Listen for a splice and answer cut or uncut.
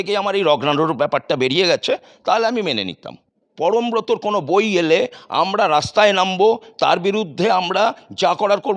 cut